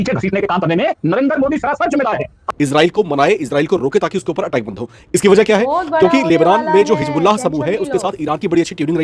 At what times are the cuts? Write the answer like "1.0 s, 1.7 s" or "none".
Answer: 2.4 s